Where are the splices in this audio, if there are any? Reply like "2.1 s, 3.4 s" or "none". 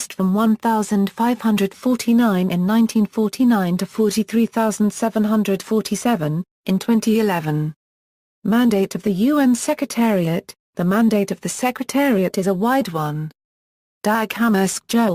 none